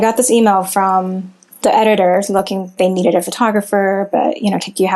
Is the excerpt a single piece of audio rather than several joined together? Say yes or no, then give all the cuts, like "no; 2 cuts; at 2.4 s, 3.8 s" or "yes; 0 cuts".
no; 1 cut; at 1.4 s